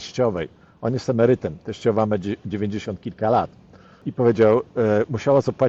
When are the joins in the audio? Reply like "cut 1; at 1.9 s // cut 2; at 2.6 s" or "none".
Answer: none